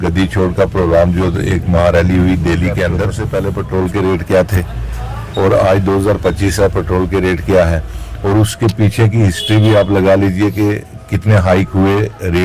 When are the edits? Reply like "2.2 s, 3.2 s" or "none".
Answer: 3.2 s